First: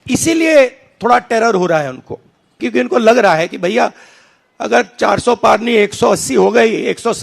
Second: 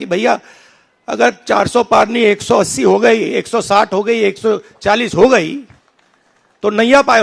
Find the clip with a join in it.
first; 1 cut; at 2.6 s

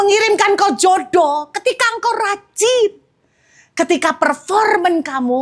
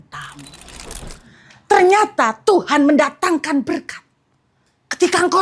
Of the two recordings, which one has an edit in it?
second; 1 cut; at 0.9 s

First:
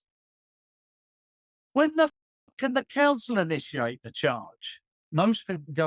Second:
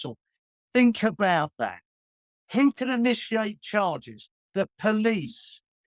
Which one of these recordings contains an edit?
first; 1 cut; at 5.0 s

